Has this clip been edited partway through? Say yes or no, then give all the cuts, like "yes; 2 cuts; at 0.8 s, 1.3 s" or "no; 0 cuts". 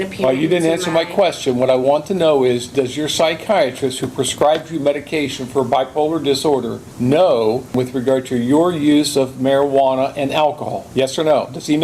yes; 3 cuts; at 6.8 s, 7.7 s, 10.7 s